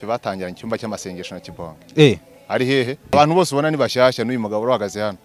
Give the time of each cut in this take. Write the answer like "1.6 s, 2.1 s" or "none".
3.1 s